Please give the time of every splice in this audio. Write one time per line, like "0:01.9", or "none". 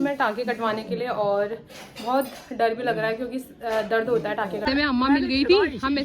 0:04.6